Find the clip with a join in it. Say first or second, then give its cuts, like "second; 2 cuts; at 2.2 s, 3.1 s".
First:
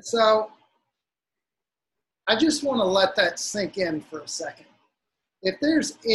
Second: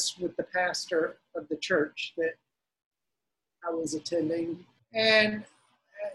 second; 1 cut; at 4.7 s